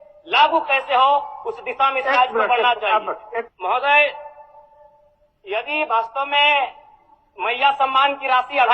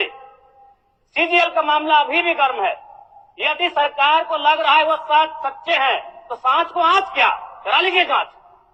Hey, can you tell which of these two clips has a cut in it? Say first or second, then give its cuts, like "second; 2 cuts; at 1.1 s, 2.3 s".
first; 1 cut; at 3.5 s